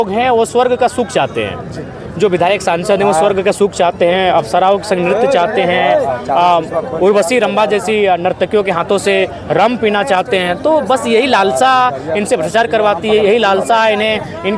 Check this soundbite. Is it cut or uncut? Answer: uncut